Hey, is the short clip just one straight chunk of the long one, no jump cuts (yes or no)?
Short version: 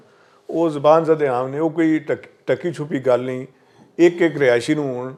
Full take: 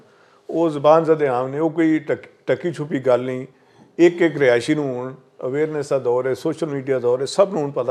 yes